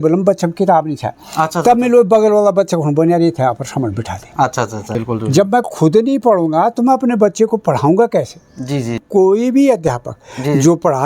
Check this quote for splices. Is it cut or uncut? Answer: cut